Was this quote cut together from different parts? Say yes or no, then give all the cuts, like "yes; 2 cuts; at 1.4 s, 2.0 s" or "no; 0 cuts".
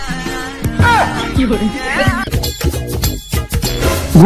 no; 0 cuts